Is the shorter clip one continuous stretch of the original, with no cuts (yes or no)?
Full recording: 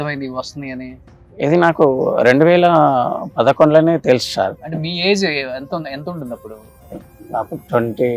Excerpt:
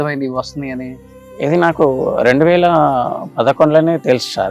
yes